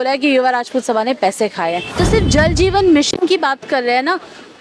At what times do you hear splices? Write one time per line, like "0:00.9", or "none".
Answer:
0:01.9